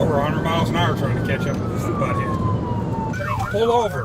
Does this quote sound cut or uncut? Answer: cut